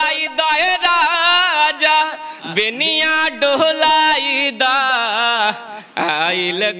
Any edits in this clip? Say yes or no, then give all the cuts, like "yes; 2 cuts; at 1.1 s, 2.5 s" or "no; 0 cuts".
no; 0 cuts